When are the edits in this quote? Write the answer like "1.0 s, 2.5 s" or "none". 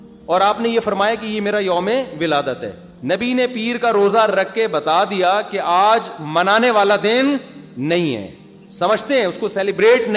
2.9 s